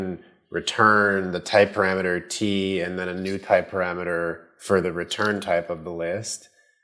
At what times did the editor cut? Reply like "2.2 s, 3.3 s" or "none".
none